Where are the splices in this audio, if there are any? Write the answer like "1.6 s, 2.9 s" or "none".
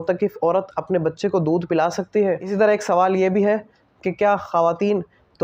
2.4 s